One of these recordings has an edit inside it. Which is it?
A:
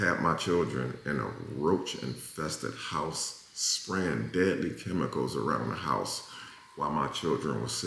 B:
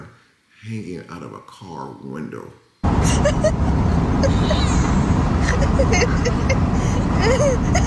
B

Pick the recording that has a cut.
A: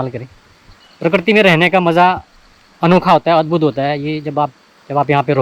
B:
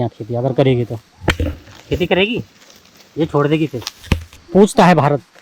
B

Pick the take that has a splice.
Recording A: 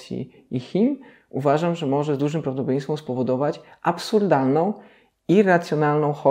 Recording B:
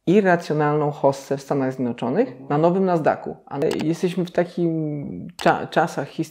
B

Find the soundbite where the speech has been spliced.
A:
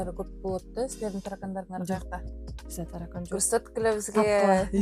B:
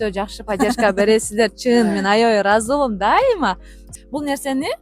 B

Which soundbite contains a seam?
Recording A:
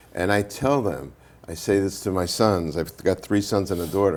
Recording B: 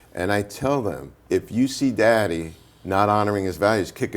B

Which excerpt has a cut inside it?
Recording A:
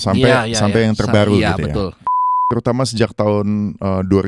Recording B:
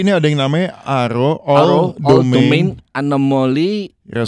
A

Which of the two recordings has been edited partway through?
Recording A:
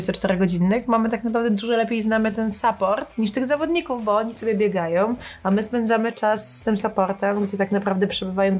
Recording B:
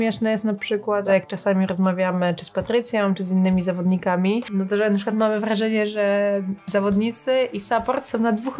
B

